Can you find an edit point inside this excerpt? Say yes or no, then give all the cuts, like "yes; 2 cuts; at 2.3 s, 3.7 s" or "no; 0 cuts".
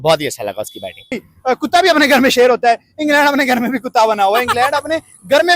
yes; 1 cut; at 1.3 s